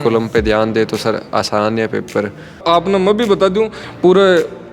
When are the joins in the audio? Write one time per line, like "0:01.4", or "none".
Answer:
0:02.5